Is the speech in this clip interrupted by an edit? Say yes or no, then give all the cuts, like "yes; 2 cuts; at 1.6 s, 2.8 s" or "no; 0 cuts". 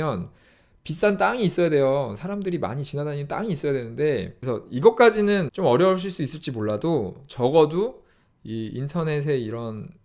yes; 2 cuts; at 4.3 s, 5.5 s